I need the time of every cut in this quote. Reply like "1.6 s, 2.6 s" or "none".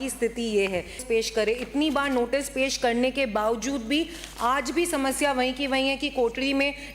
1.0 s